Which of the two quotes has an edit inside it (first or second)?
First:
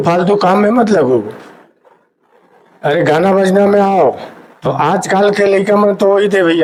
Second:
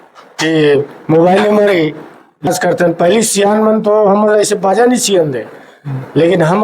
second